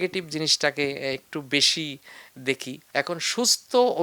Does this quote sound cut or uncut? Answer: cut